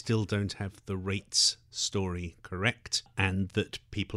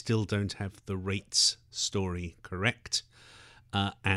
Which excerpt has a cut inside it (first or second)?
first